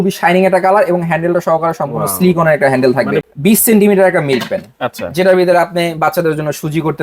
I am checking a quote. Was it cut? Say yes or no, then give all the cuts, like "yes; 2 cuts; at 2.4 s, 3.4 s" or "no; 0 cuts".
yes; 1 cut; at 3.3 s